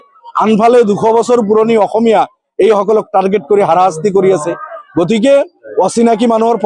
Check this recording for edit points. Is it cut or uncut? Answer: uncut